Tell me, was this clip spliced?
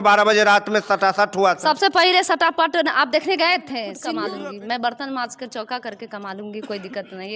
yes; 1 cut; at 4.2 s

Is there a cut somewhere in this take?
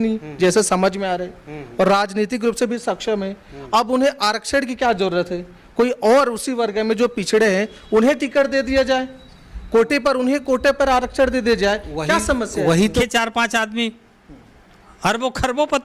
yes; 1 cut; at 13.0 s

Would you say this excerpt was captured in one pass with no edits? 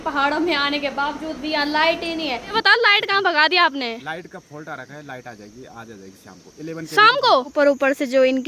no; 2 cuts; at 2.6 s, 7.5 s

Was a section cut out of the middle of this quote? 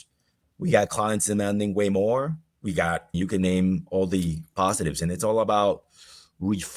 yes; 1 cut; at 2.6 s

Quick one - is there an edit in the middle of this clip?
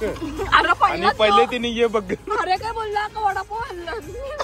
no; 0 cuts

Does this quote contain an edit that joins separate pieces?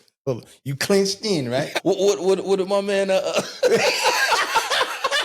yes; 1 cut; at 1.7 s

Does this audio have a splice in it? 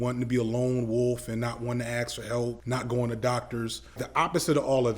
yes; 2 cuts; at 2.6 s, 4.0 s

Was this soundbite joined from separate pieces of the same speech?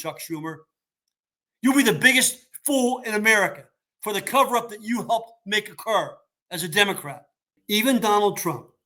yes; 1 cut; at 7.5 s

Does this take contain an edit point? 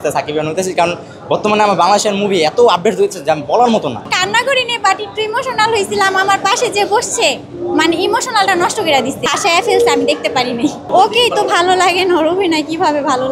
yes; 3 cuts; at 4.0 s, 9.2 s, 10.8 s

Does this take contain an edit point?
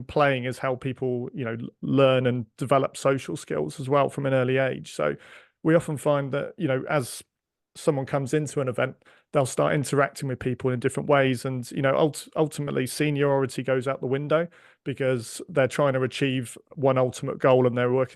no; 0 cuts

